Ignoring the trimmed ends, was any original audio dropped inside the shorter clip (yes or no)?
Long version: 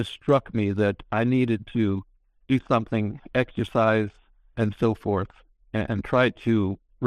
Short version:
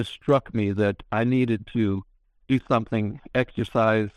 no